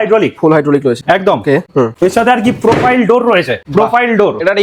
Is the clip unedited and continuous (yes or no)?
yes